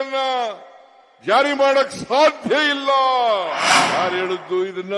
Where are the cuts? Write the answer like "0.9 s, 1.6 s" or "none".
3.7 s